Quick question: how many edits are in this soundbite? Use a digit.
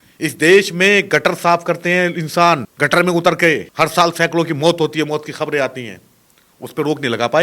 2